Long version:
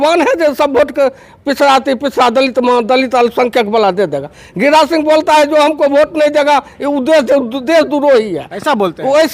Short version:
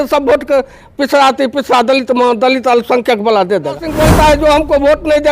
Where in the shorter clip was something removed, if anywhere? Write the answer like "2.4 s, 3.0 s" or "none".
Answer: 3.9 s

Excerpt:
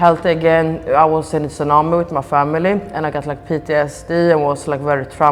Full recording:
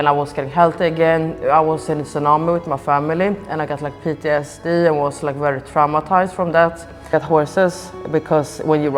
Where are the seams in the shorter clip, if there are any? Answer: none

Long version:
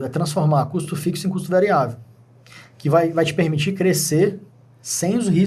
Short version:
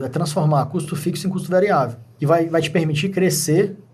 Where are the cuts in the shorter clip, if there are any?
2.1 s

